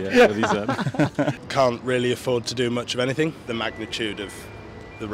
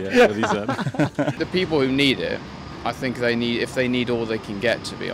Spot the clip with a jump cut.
first; 2 cuts; at 1.4 s, 3.4 s

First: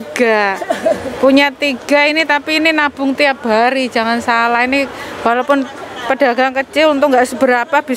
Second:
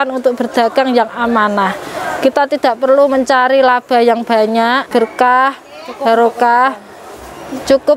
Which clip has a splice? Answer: second; 1 cut; at 4.8 s

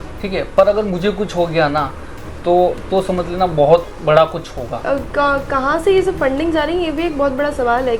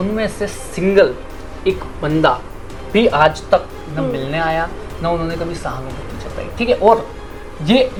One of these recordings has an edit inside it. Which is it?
first; 1 cut; at 4.8 s

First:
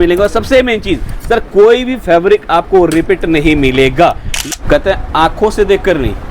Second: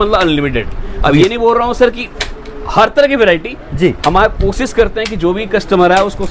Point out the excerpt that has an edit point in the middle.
first; 1 cut; at 4.3 s

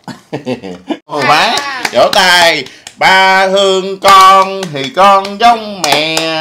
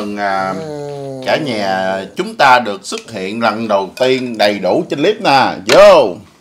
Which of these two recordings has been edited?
first; 1 cut; at 1.2 s

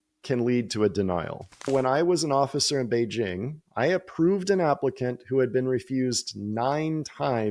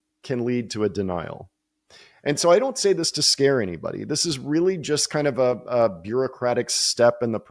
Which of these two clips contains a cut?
first; 1 cut; at 1.7 s

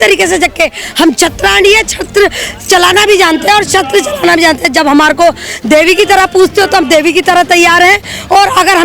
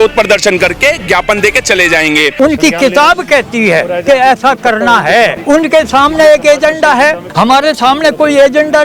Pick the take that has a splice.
second; 3 cuts; at 2.3 s, 5.4 s, 7.2 s

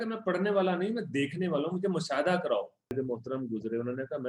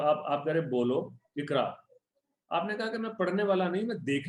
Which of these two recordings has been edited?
first; 1 cut; at 2.9 s

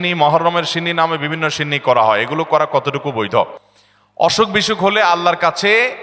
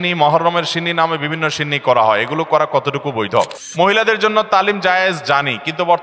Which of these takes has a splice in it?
second; 1 cut; at 3.6 s

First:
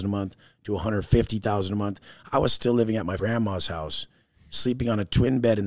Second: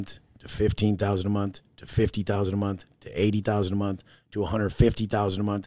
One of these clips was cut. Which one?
first; 1 cut; at 3.2 s

